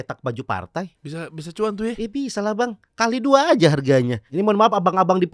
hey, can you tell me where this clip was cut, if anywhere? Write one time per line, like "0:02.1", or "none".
0:01.0
0:04.2